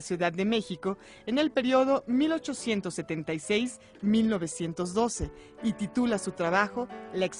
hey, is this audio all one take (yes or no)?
no